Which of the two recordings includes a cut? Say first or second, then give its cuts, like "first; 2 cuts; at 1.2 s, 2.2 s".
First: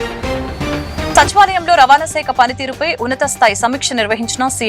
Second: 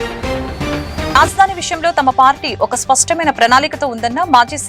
first; 1 cut; at 1.1 s